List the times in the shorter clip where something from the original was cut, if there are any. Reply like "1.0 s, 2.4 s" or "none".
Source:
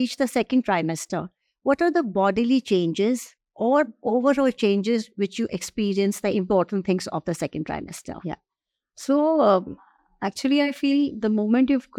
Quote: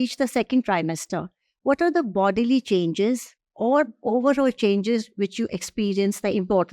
none